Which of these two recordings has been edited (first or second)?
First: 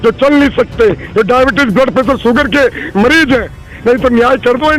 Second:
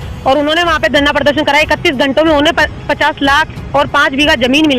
first